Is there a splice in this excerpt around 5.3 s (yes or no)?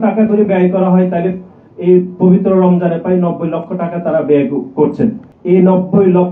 yes